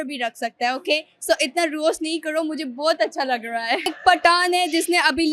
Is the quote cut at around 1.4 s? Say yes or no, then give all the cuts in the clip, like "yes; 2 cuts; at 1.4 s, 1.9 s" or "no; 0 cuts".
no; 1 cut; at 3.9 s